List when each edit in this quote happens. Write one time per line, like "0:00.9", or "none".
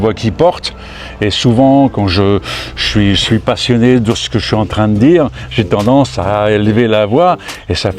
none